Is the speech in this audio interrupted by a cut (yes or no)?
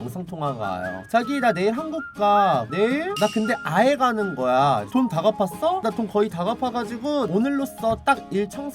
yes